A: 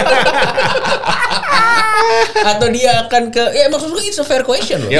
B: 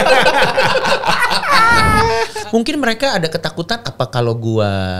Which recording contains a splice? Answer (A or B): B